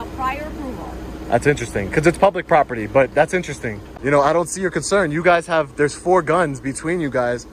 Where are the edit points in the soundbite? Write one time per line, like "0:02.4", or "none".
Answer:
0:03.8